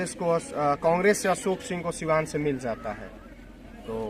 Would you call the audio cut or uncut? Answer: uncut